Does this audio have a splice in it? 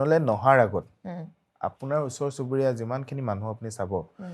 no; 0 cuts

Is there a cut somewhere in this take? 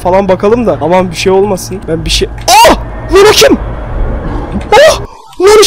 yes; 2 cuts; at 0.8 s, 1.7 s

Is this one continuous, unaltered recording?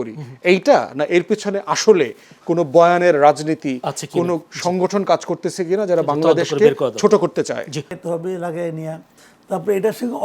no; 1 cut; at 7.9 s

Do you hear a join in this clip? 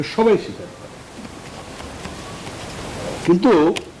no; 0 cuts

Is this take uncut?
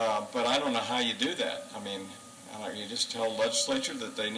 yes; 0 cuts

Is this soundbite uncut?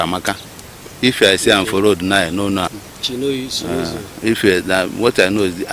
no; 1 cut; at 2.8 s

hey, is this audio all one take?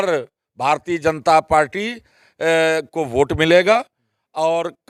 yes; 0 cuts

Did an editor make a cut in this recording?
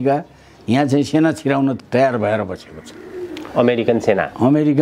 yes; 1 cut; at 1.8 s

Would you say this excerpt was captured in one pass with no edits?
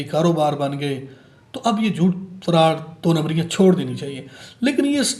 yes; 0 cuts

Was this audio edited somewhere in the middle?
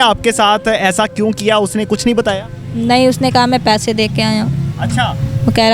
no; 0 cuts

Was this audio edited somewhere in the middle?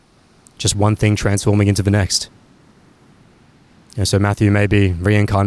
no; 0 cuts

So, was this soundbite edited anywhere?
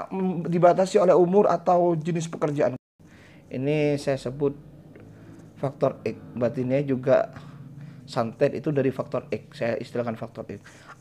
yes; 1 cut; at 2.8 s

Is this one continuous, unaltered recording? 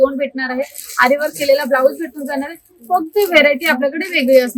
yes; 0 cuts

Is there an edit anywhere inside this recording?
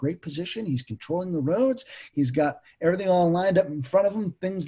no; 0 cuts

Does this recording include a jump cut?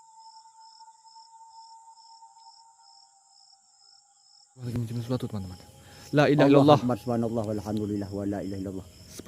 yes; 1 cut; at 4.6 s

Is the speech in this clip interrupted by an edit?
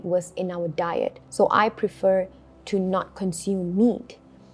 yes; 1 cut; at 1.2 s

